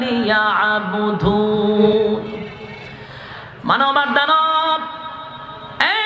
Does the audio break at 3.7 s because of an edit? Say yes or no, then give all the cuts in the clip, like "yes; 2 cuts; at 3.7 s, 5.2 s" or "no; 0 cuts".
no; 1 cut; at 1.9 s